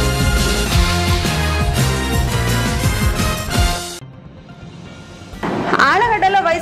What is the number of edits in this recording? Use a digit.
0